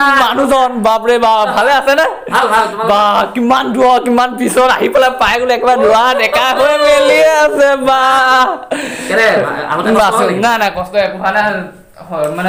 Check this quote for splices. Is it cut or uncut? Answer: uncut